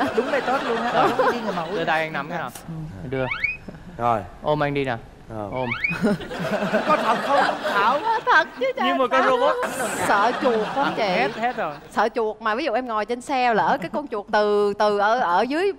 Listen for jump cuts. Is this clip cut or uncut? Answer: cut